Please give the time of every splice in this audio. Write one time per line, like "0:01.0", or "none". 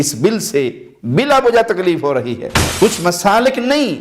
0:02.6